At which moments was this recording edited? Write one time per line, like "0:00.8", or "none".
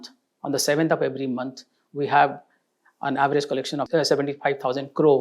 0:03.9

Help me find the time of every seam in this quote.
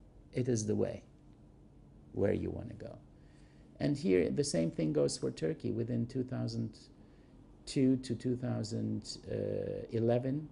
0:05.3

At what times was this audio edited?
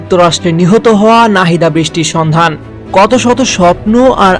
none

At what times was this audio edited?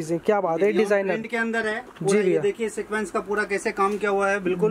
none

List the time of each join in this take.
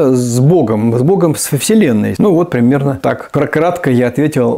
0:02.1
0:03.2

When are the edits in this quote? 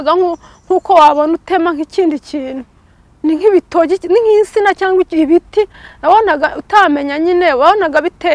none

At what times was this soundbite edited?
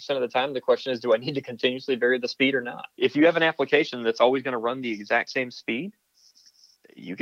none

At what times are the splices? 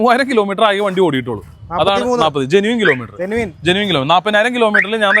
none

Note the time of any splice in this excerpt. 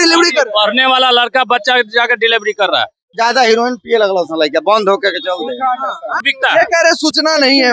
0:03.1
0:06.3

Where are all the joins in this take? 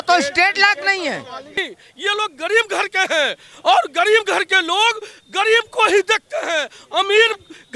0:01.6

